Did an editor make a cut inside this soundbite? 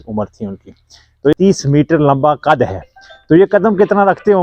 yes; 1 cut; at 1.3 s

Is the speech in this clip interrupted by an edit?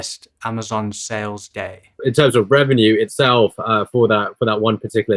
yes; 1 cut; at 1.9 s

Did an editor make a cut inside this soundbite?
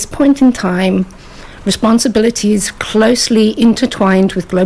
no; 0 cuts

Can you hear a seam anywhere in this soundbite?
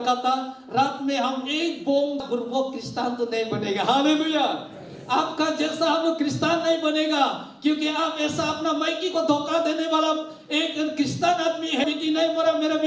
yes; 2 cuts; at 2.2 s, 11.9 s

